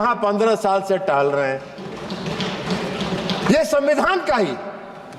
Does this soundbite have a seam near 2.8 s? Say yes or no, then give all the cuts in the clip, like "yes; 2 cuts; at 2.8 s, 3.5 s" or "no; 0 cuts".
no; 0 cuts